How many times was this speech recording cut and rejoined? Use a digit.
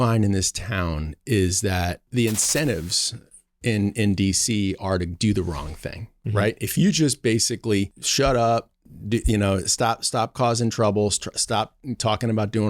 2